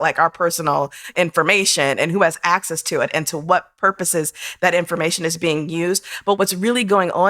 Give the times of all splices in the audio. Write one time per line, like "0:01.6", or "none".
0:01.1
0:06.4